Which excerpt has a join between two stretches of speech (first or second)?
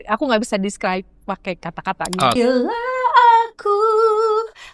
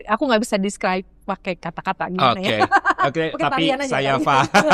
first